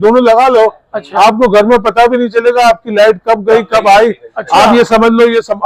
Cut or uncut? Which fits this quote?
uncut